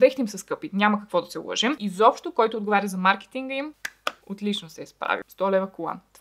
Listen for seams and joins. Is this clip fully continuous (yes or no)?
no